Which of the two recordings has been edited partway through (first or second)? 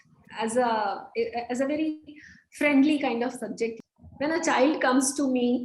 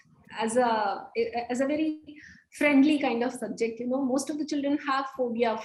first